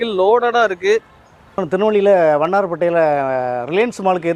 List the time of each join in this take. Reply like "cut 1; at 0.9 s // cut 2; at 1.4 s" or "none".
cut 1; at 1.6 s